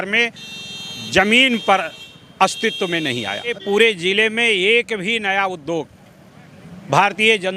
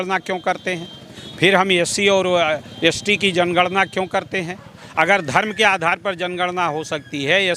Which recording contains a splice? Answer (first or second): first